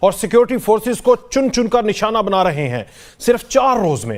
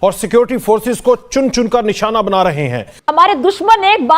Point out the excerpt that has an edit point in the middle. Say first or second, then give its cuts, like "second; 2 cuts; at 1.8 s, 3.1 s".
second; 1 cut; at 2.9 s